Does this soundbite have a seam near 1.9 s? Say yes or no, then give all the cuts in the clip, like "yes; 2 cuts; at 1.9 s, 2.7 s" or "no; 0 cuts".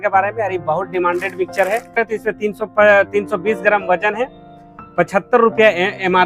yes; 1 cut; at 1.9 s